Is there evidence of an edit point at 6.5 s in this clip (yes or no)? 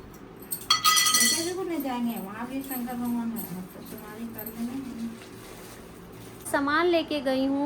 yes